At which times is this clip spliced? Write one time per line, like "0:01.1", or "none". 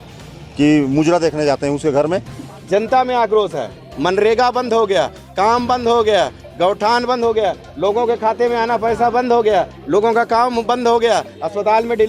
0:02.4